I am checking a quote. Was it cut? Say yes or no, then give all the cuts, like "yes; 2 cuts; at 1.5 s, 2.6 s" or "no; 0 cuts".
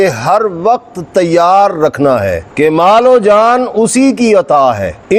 yes; 1 cut; at 2.4 s